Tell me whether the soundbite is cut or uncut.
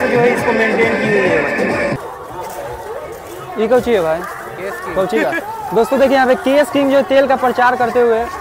cut